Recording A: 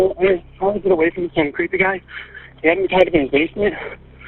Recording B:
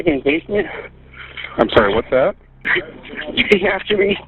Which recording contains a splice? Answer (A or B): B